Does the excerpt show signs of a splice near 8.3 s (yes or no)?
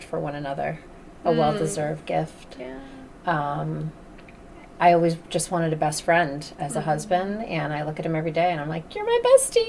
no